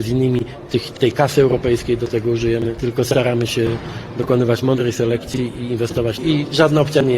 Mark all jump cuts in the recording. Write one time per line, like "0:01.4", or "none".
0:02.8
0:06.2